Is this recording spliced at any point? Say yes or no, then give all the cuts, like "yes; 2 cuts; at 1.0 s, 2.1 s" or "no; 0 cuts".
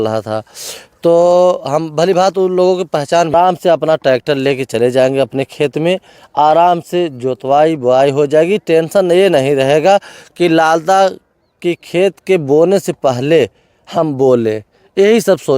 yes; 1 cut; at 3.3 s